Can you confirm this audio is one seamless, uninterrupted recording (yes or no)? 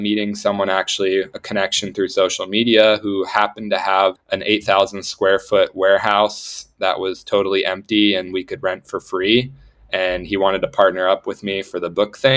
no